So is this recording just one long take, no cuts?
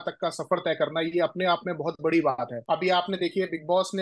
no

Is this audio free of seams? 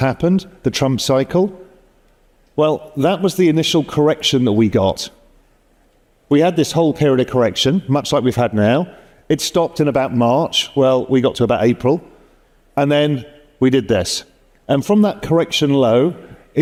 yes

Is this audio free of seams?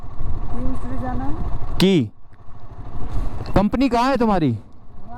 yes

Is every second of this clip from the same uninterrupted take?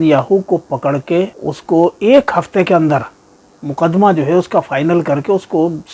no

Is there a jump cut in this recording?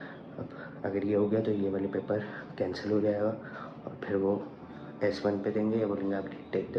no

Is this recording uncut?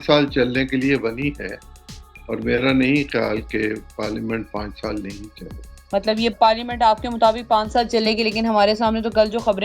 yes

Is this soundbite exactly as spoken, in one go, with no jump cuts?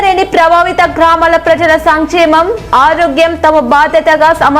yes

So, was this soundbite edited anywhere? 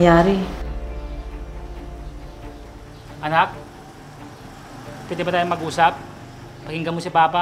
no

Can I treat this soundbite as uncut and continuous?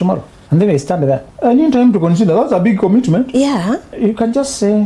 no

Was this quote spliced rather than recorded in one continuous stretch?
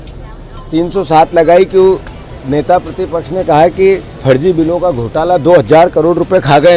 no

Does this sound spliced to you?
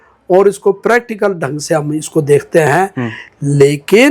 no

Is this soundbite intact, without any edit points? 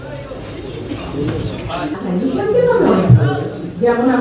no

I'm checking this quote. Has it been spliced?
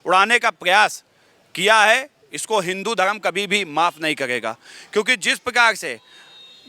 no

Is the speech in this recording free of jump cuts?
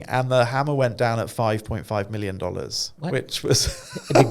no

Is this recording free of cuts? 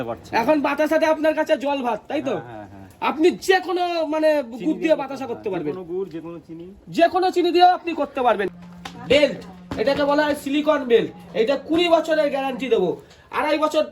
no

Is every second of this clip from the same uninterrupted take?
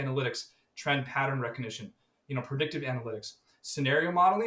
yes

